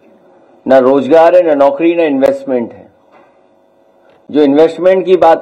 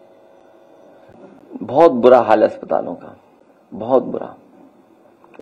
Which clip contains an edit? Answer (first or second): second